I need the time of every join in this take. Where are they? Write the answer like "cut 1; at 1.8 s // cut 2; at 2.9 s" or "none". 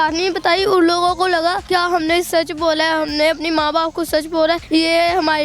cut 1; at 1.6 s // cut 2; at 4.6 s